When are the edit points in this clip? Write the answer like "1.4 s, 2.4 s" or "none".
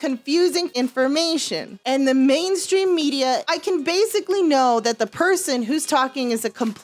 0.7 s, 1.8 s, 3.5 s